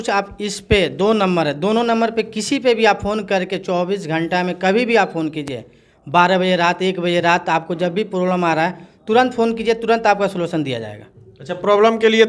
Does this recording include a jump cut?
no; 0 cuts

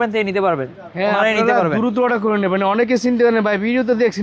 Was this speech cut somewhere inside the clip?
no; 0 cuts

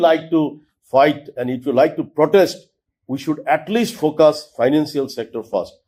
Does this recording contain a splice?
no; 0 cuts

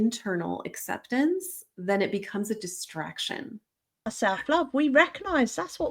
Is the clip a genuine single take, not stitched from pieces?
no; 1 cut; at 4.1 s

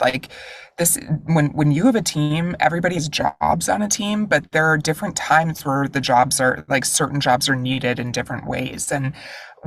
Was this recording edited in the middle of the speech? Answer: no; 0 cuts

